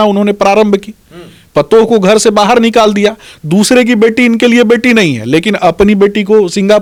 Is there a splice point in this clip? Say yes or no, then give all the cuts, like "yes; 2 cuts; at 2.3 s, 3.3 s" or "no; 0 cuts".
no; 0 cuts